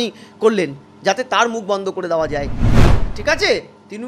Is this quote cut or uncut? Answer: cut